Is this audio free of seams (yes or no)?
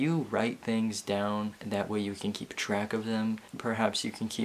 no